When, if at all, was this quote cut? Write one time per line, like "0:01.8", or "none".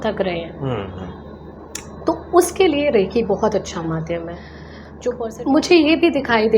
0:05.2